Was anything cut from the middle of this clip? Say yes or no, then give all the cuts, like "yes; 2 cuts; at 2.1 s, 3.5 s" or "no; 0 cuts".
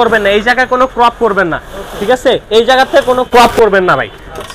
no; 0 cuts